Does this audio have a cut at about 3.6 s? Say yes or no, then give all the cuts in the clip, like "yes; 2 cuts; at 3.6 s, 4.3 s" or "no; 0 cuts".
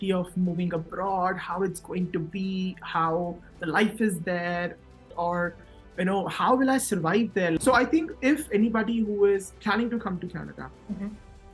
no; 2 cuts; at 5.1 s, 7.6 s